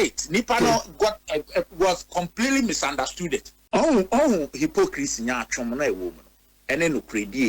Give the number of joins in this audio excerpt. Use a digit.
1